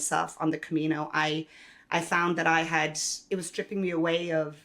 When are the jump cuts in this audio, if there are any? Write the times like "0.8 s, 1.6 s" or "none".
3.1 s